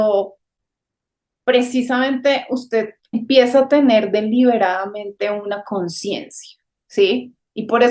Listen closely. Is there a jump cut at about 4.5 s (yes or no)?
no